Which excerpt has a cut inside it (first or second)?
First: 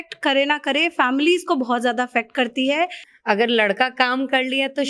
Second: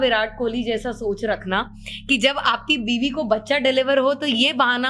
first